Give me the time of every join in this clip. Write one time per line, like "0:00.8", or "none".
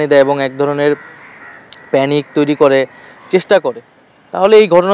none